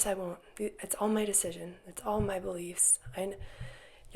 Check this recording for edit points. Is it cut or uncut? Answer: uncut